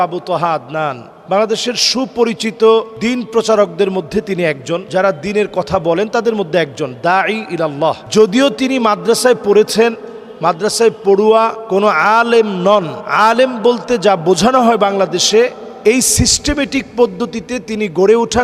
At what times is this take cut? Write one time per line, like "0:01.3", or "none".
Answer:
none